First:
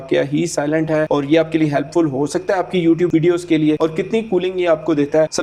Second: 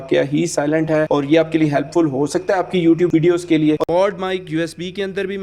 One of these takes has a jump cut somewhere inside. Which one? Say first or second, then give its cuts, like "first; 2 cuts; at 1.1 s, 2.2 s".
second; 1 cut; at 3.8 s